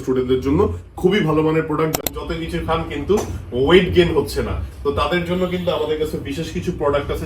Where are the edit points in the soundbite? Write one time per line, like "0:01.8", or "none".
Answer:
0:02.0